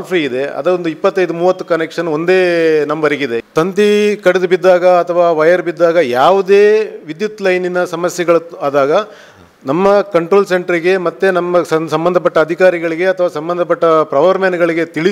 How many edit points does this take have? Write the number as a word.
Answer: one